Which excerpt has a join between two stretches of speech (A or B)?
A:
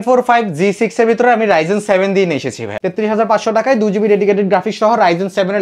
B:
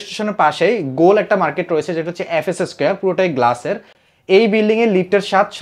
A